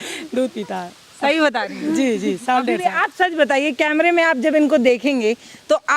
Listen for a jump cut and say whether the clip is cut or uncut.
uncut